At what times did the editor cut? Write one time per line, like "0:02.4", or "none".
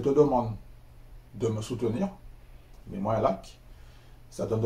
0:02.7